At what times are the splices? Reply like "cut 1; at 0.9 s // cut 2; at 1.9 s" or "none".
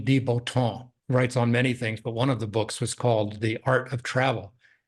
cut 1; at 0.9 s